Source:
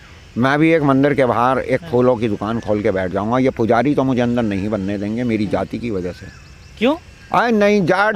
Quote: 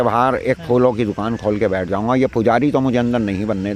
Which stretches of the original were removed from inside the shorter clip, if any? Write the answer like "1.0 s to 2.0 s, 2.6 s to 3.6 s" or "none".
none